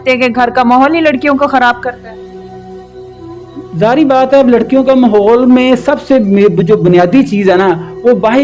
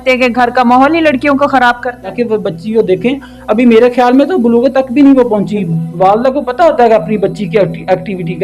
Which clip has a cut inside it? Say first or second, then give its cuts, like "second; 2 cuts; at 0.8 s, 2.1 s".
second; 2 cuts; at 2.1 s, 5.7 s